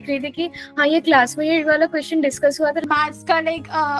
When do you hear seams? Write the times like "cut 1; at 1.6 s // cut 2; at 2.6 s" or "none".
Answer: cut 1; at 2.8 s